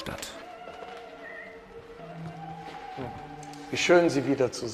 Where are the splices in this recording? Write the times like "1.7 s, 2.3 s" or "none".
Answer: 1.4 s